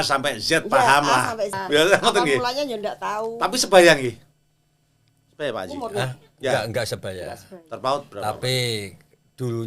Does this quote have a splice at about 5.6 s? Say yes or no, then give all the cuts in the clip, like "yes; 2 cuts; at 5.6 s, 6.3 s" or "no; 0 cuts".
no; 1 cut; at 1.6 s